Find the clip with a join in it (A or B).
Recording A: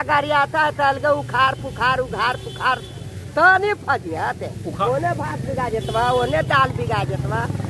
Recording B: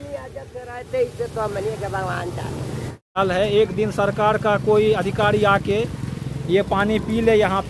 B